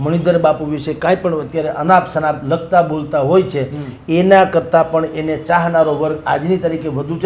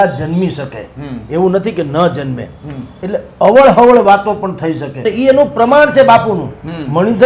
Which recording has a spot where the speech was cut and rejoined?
second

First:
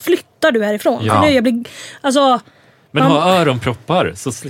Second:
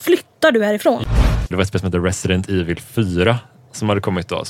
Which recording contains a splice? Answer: second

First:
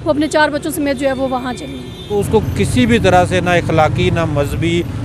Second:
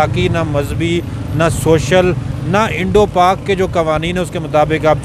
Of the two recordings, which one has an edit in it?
first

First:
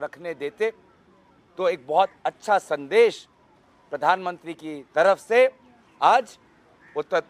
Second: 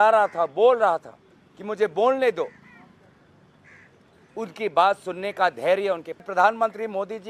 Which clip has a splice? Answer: second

